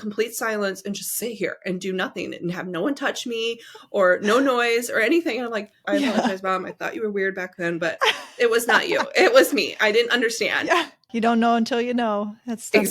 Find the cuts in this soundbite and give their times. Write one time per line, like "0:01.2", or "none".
0:05.8
0:11.1